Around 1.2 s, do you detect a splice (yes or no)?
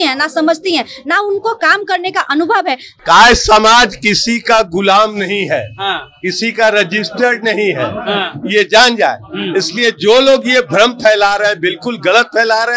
no